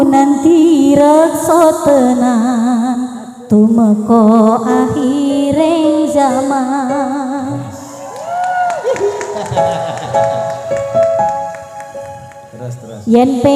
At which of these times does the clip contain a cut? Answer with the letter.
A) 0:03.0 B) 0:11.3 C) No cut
C